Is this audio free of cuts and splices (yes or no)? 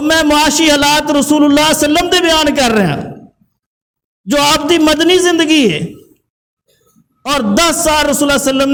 yes